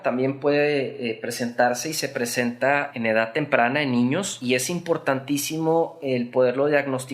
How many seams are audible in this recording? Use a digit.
2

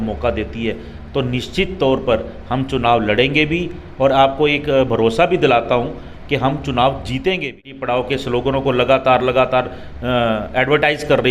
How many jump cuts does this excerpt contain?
1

